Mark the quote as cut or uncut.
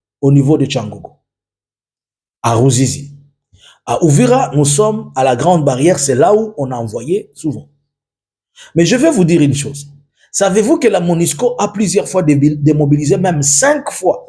uncut